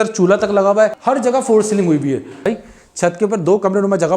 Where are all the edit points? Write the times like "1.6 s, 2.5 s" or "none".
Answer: 1.0 s, 2.4 s